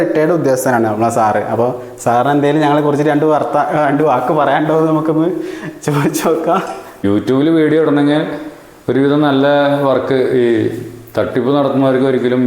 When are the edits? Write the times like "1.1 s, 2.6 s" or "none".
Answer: 7.0 s